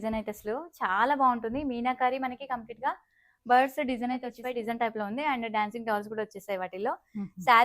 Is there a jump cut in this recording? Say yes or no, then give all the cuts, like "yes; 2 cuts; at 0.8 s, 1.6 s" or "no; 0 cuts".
yes; 1 cut; at 4.3 s